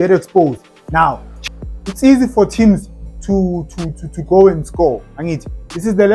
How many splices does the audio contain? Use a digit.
1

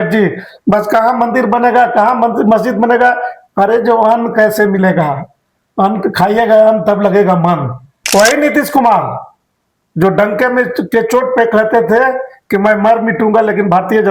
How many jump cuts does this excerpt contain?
1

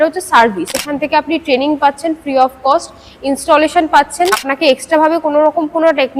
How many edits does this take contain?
2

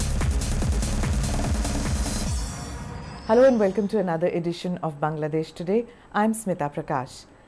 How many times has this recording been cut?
1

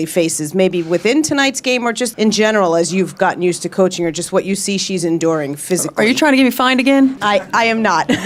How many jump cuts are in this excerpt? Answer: 0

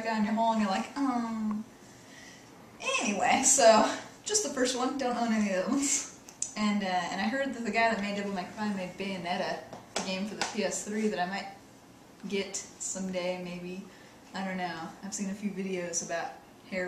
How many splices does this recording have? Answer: 1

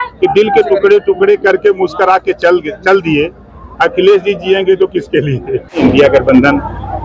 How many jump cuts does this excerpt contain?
1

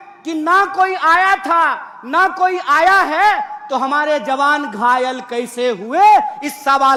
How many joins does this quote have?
0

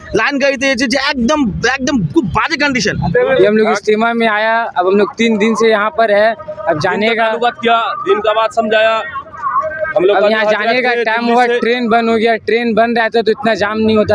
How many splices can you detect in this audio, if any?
1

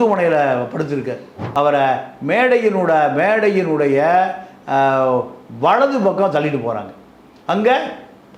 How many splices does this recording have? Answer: 1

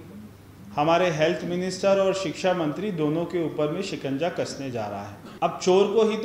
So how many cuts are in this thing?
1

